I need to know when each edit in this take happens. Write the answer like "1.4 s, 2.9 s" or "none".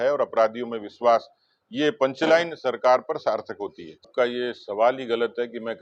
4.0 s

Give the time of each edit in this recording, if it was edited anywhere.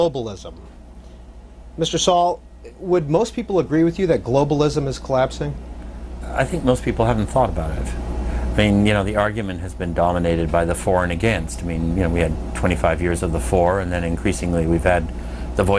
1.2 s

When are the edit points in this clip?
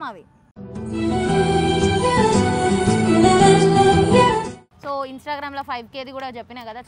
4.7 s

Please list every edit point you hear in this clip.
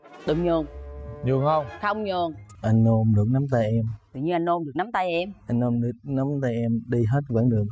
2.5 s

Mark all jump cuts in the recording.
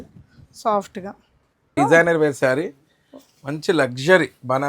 1.7 s

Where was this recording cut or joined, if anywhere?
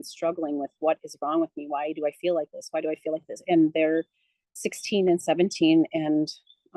none

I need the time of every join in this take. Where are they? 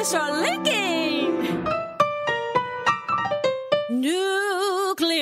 none

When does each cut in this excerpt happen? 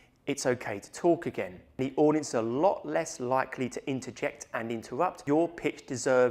1.6 s, 5.2 s

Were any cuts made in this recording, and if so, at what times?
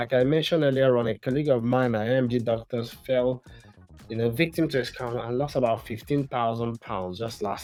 none

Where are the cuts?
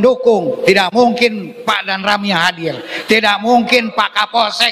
1.5 s

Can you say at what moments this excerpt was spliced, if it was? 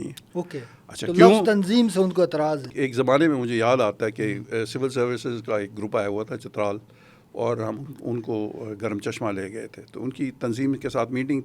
2.7 s

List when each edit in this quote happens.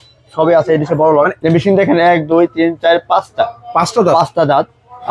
1.3 s

